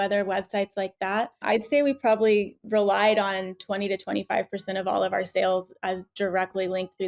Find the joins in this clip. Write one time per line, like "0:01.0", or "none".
0:01.4
0:02.6